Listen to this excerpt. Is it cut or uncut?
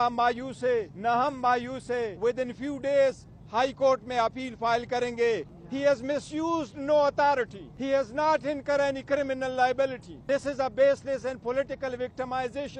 cut